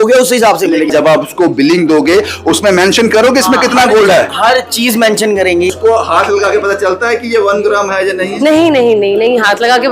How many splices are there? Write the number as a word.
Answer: two